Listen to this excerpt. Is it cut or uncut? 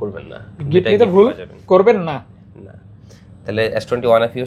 uncut